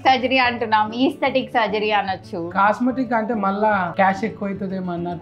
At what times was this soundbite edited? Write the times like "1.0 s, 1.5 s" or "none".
none